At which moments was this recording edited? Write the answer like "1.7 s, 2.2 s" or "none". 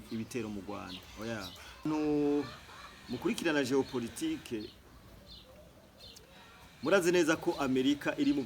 1.9 s